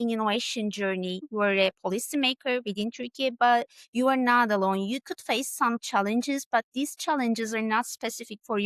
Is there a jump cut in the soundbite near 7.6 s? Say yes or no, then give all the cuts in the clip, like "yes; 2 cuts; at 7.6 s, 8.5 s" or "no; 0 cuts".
no; 1 cut; at 1.3 s